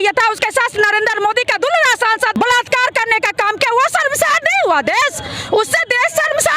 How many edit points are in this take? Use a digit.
1